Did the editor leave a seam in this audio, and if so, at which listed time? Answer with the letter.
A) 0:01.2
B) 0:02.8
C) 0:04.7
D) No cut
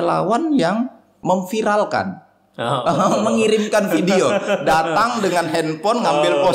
A